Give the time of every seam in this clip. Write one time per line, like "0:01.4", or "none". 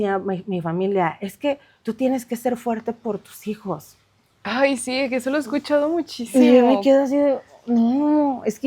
none

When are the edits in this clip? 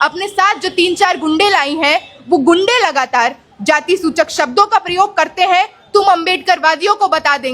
none

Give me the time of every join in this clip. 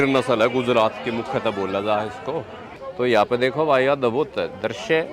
0:02.8

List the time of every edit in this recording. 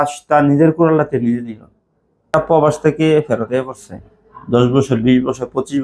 0:02.3

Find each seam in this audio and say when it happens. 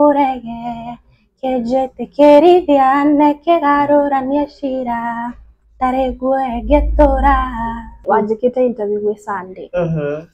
0:08.0

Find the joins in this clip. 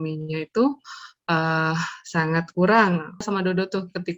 0:03.2

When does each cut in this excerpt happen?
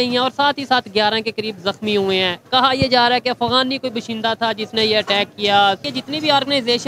0:05.9

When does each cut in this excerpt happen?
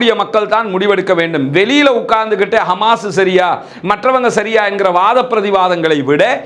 none

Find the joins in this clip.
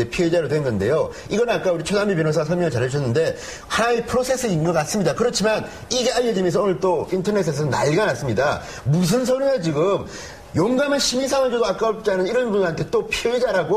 0:05.0

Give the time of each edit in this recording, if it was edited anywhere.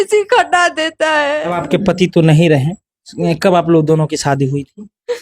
0:01.5

